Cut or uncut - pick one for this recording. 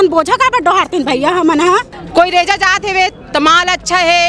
cut